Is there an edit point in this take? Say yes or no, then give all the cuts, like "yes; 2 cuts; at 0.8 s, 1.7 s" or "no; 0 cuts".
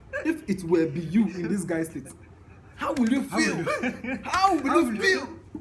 yes; 1 cut; at 2.2 s